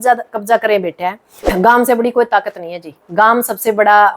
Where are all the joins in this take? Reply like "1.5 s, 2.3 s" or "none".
1.5 s